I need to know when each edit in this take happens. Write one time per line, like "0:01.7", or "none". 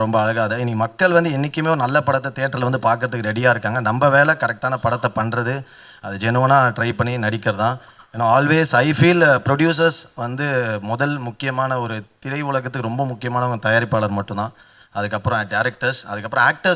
none